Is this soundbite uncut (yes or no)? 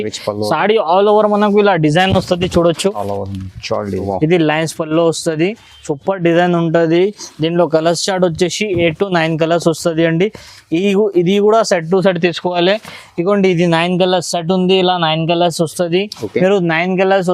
no